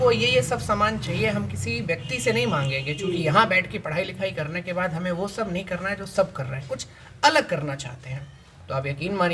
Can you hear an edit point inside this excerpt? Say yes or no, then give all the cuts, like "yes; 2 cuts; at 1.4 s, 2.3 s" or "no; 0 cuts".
no; 0 cuts